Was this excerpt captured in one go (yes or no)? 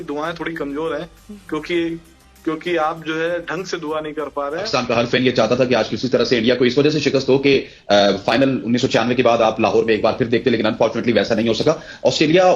no